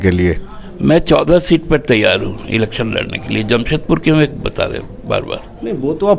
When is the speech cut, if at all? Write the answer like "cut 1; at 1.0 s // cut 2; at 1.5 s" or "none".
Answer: none